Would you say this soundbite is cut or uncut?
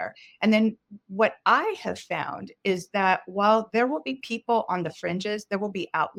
uncut